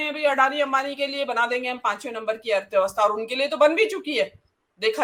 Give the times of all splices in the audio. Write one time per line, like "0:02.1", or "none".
none

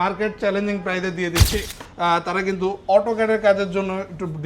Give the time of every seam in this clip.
0:01.7

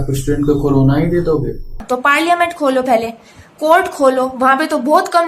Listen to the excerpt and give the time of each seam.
0:01.8

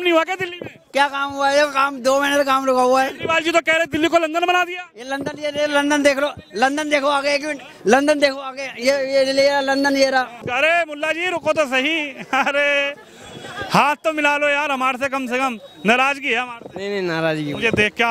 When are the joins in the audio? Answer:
0:10.4

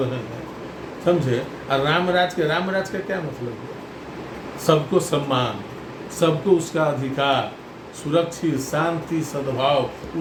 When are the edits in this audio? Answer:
none

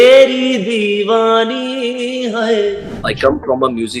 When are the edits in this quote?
0:03.1

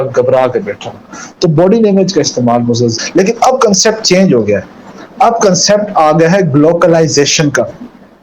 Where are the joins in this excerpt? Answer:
0:03.0

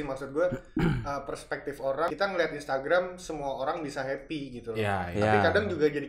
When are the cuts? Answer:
0:02.1

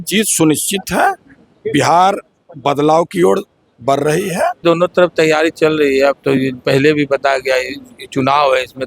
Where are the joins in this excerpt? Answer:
0:04.6

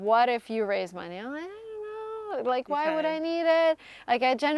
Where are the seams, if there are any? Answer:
none

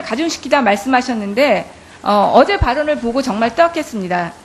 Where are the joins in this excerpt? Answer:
0:03.3

